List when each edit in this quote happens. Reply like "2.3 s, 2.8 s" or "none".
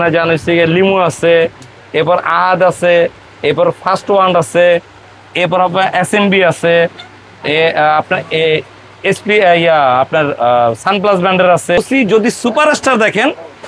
11.8 s